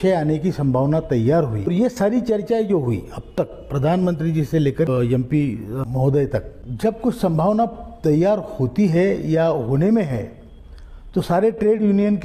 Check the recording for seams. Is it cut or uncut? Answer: cut